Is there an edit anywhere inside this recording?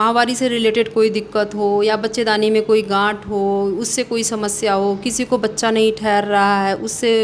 no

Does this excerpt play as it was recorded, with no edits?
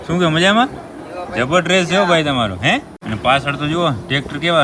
no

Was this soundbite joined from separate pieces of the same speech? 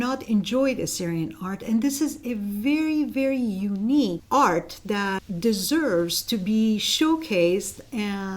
yes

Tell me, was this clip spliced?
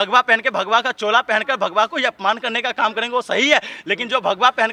no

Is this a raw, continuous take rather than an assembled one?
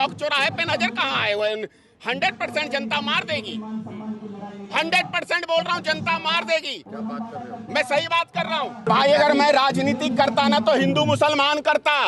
no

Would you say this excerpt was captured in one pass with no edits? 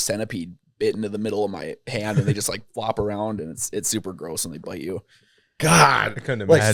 yes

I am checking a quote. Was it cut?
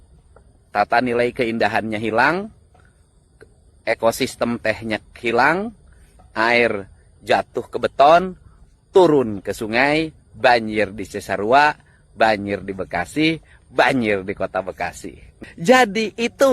yes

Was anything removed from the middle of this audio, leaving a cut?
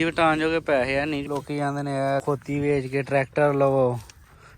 yes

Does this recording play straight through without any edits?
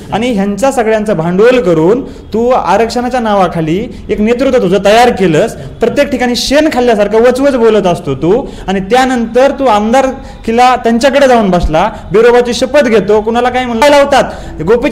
no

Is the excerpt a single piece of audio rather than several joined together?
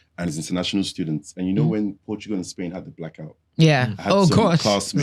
yes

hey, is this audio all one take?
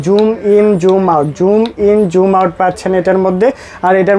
yes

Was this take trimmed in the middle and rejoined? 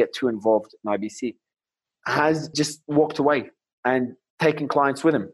yes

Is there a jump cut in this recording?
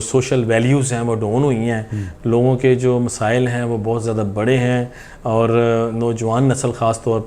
no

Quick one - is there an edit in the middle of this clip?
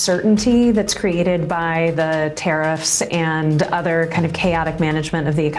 no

